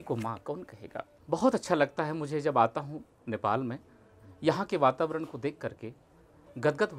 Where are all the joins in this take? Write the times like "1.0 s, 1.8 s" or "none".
1.1 s

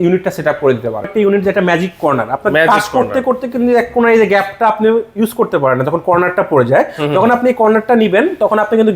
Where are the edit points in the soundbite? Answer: 1.1 s

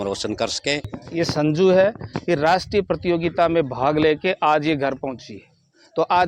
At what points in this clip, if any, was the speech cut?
0.9 s

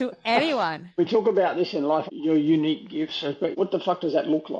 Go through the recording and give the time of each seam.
1.0 s, 2.1 s

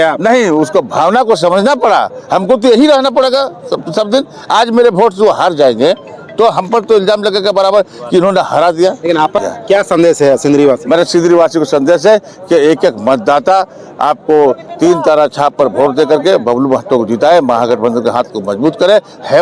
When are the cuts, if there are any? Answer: 9.4 s

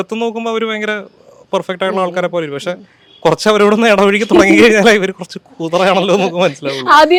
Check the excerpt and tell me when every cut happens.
none

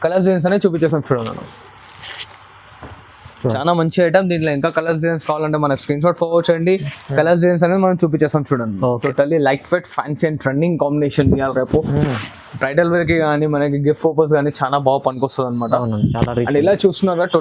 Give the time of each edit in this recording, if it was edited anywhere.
3.4 s, 9.0 s

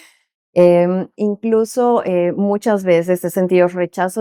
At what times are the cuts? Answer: none

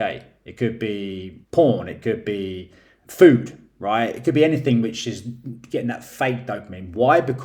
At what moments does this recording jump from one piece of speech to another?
1.3 s

